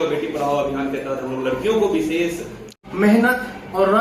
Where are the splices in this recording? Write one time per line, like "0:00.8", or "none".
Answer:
0:02.8